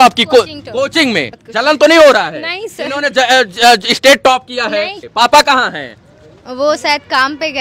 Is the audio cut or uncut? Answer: cut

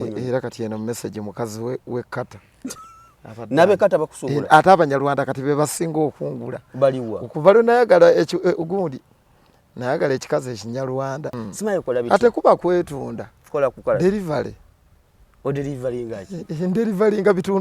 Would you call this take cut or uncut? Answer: cut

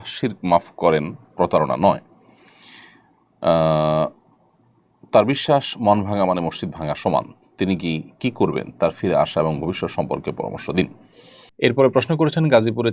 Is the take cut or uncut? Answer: cut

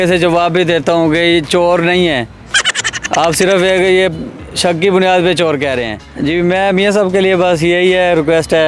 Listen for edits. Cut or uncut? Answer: cut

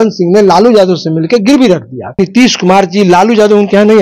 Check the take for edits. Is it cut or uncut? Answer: cut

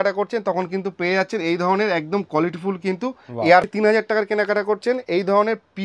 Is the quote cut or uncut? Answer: cut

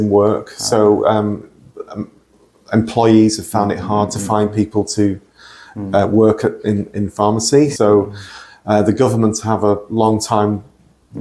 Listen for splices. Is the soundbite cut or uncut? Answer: cut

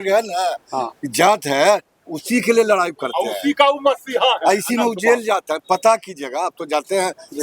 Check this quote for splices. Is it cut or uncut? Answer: uncut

